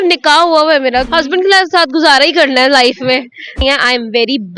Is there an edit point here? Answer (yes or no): yes